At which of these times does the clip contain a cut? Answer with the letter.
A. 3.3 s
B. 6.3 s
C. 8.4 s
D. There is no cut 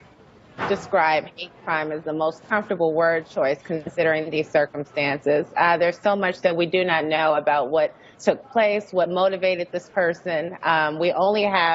A